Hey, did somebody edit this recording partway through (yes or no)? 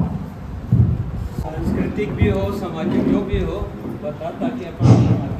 no